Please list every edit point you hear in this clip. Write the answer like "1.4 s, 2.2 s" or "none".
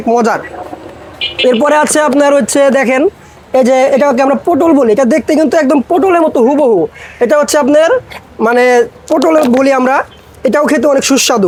none